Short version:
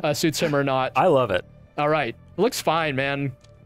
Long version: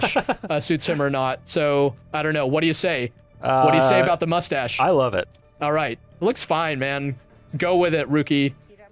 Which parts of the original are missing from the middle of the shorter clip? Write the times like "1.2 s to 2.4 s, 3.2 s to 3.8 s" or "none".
1.4 s to 4.7 s